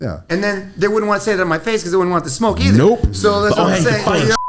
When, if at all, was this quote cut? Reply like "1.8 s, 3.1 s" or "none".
none